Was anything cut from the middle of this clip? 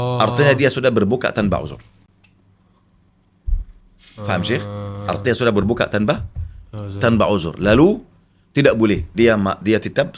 no; 0 cuts

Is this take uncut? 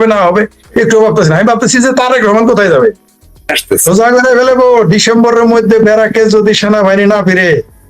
no; 1 cut; at 3.6 s

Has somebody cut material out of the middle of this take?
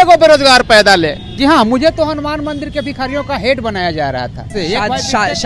yes; 2 cuts; at 1.3 s, 4.5 s

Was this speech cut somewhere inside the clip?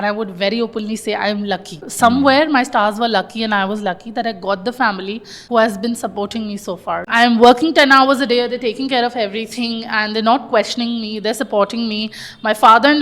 yes; 3 cuts; at 1.9 s, 5.3 s, 7.1 s

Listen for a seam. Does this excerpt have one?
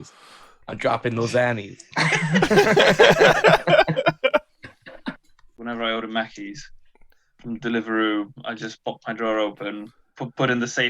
yes; 1 cut; at 5.5 s

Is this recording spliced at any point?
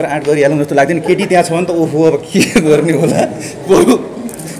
no; 0 cuts

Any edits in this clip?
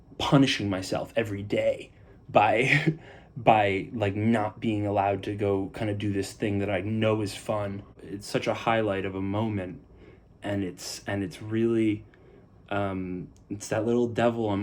yes; 1 cut; at 7.9 s

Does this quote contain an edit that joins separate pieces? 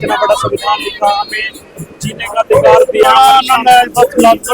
yes; 1 cut; at 3.0 s

